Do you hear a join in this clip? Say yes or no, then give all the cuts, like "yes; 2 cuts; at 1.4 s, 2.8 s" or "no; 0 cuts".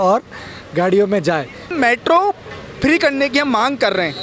yes; 1 cut; at 1.7 s